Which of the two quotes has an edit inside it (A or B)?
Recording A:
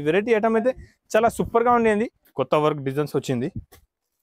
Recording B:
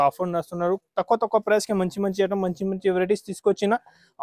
A